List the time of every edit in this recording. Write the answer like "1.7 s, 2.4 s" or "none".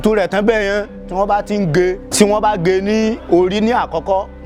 2.0 s